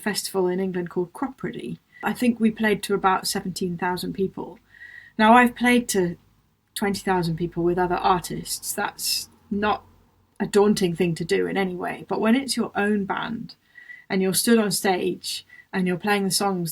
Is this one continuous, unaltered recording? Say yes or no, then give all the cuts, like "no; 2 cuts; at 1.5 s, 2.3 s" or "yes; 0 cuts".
no; 1 cut; at 1.9 s